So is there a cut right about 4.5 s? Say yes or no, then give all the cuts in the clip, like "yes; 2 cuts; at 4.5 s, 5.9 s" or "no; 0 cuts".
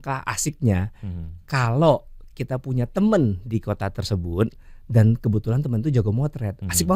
no; 0 cuts